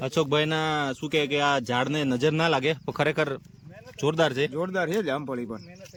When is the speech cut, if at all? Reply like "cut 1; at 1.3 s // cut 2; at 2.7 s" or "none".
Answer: none